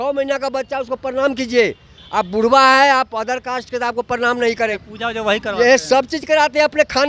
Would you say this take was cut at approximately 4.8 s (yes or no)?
yes